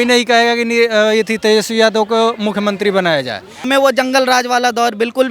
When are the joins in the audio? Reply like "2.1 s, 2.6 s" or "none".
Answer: 3.6 s